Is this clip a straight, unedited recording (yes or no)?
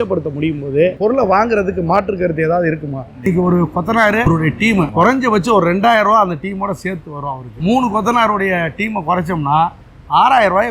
no